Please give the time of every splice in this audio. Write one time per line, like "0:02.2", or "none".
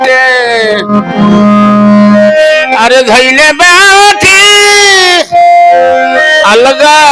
none